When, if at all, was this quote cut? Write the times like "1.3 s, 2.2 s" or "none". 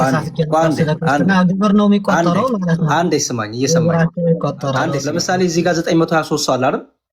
5.1 s